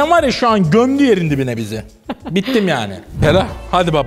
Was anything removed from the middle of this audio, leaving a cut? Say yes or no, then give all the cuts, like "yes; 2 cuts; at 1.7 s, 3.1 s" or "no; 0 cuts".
yes; 1 cut; at 3.0 s